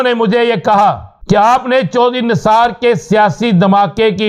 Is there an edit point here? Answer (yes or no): yes